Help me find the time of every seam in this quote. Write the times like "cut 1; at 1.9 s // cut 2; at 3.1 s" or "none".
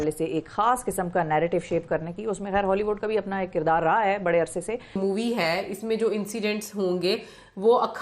cut 1; at 5.0 s